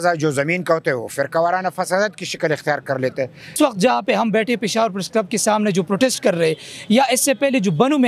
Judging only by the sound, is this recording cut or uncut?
cut